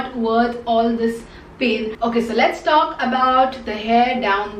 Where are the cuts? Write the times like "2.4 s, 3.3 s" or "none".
1.9 s